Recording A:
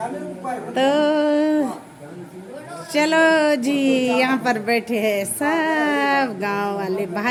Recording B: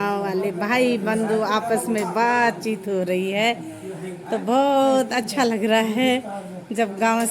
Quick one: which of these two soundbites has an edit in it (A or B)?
B